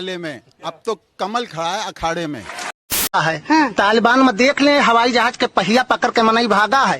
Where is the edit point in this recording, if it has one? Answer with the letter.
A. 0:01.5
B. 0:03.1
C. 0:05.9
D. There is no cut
B